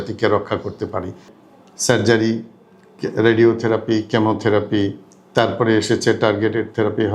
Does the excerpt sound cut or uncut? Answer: cut